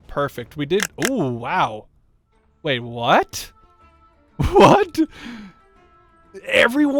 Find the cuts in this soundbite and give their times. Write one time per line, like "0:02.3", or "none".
none

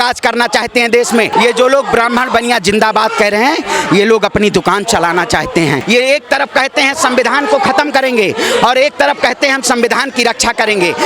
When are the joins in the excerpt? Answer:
0:01.3
0:05.8

